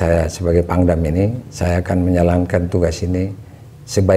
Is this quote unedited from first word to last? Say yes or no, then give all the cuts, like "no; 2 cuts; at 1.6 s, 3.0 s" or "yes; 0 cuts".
yes; 0 cuts